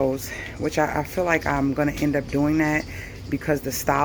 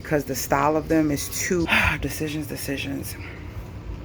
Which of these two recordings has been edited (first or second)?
second